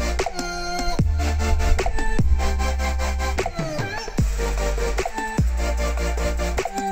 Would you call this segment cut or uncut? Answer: uncut